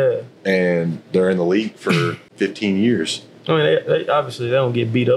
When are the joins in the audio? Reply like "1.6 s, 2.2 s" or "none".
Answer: 2.2 s